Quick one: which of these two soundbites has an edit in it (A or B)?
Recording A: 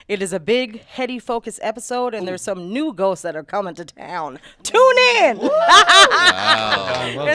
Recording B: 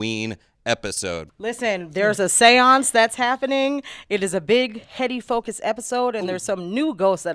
B